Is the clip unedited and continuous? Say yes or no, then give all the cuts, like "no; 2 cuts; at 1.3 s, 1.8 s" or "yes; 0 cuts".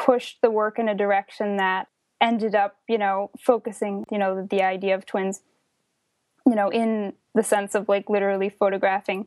no; 2 cuts; at 1.9 s, 4.1 s